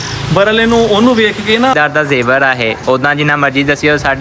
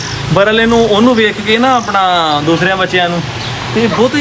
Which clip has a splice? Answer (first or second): first